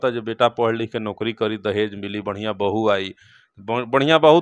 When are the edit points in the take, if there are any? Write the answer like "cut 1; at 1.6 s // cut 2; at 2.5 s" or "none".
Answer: none